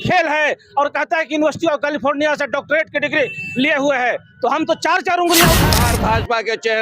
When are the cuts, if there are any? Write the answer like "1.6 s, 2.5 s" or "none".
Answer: 5.8 s